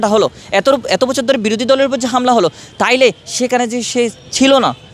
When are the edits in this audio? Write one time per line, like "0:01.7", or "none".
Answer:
none

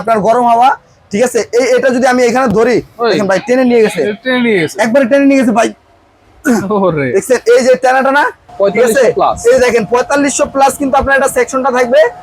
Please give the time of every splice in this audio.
0:08.4

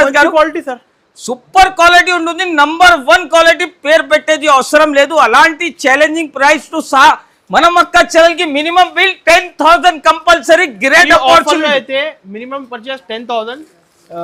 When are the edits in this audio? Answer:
none

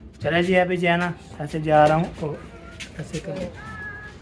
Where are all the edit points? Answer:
0:03.3

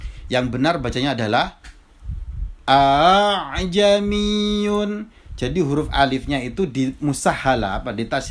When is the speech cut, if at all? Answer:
none

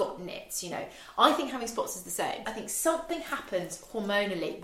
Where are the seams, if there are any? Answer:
0:02.4

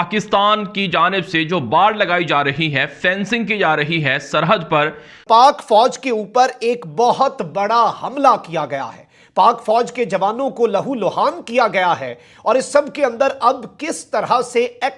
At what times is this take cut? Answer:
0:05.2

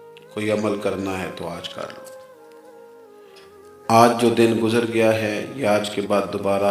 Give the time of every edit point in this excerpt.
0:02.2
0:03.7

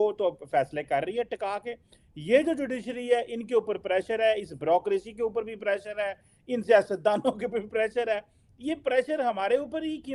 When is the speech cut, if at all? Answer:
none

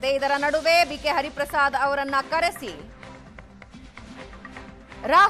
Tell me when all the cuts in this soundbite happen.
none

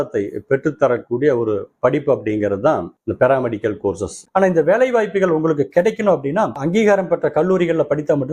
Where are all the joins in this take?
0:04.3

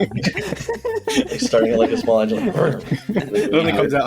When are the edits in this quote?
0:01.1
0:03.0

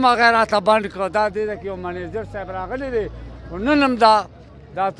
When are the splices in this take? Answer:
none

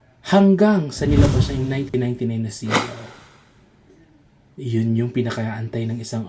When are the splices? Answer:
none

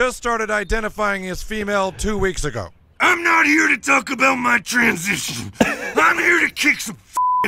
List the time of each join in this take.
none

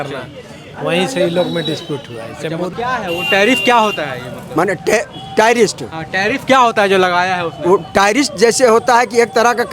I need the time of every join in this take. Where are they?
0:02.7

